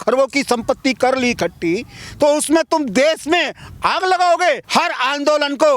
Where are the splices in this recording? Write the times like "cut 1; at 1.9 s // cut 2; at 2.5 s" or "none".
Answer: cut 1; at 4.6 s

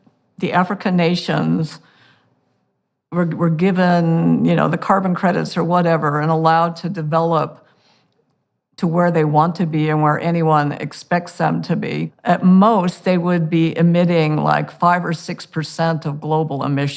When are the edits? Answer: cut 1; at 12.1 s

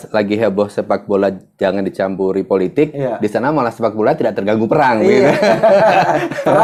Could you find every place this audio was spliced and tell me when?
none

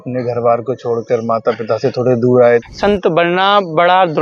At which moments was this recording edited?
cut 1; at 2.7 s

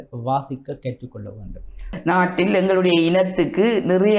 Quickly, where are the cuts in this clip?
cut 1; at 1.9 s

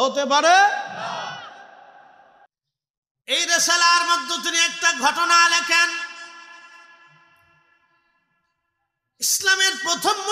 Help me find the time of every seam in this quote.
cut 1; at 2.5 s

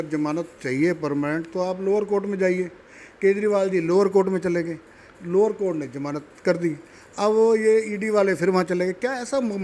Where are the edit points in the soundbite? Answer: none

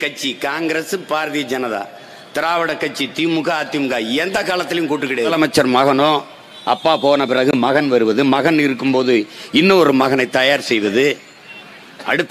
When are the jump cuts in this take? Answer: cut 1; at 5.3 s

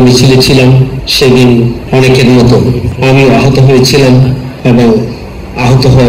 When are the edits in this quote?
cut 1; at 1.0 s // cut 2; at 1.8 s // cut 3; at 2.9 s // cut 4; at 4.5 s

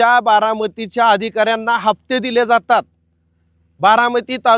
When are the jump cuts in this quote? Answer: none

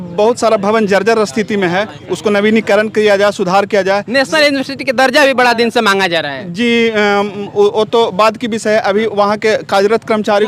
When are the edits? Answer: none

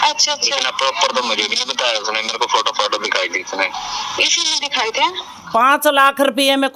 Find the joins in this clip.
cut 1; at 5.3 s

